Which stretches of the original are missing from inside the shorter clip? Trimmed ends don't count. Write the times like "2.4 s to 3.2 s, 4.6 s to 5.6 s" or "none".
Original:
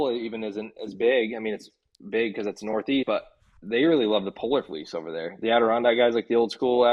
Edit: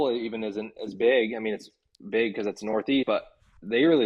none